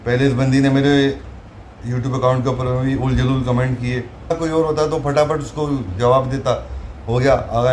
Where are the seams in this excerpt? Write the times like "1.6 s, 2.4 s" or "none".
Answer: 4.3 s